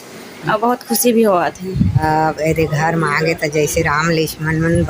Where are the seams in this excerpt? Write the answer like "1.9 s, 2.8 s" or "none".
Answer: 2.0 s